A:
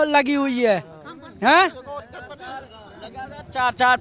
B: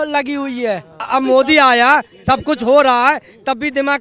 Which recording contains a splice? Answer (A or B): B